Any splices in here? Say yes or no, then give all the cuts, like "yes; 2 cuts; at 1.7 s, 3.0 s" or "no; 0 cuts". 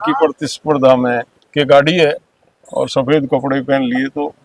yes; 1 cut; at 1.4 s